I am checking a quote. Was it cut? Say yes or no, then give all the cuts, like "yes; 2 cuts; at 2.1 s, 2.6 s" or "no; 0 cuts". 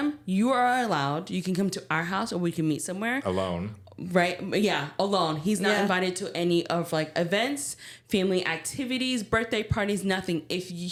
no; 0 cuts